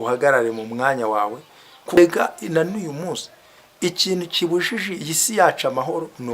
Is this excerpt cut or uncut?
cut